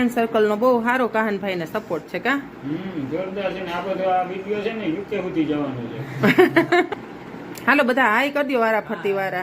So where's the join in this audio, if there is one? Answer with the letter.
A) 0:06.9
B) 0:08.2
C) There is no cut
A